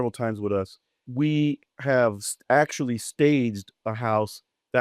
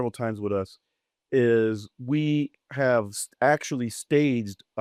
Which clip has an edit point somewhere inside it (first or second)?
first